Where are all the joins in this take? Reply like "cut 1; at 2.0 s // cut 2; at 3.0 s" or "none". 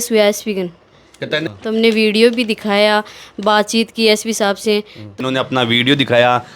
cut 1; at 1.3 s // cut 2; at 5.2 s